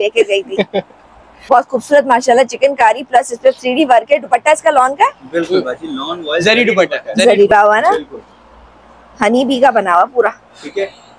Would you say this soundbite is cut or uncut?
cut